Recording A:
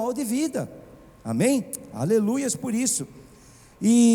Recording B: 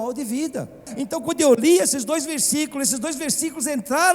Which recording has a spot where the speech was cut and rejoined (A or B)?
B